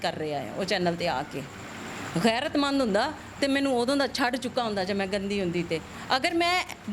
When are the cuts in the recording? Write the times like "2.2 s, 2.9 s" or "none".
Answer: none